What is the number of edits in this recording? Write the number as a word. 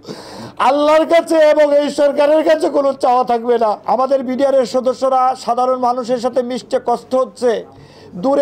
one